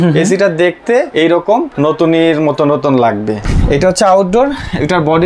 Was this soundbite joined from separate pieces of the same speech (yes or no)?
yes